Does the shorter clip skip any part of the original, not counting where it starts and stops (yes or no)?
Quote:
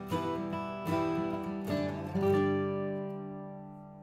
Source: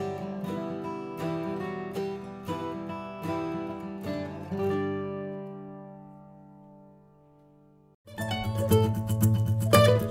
no